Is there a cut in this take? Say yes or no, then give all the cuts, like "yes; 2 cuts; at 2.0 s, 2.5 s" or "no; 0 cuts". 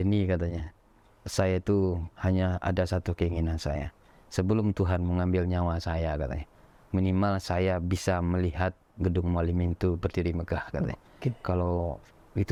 no; 0 cuts